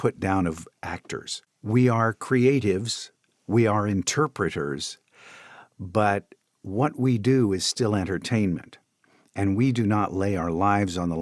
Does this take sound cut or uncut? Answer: cut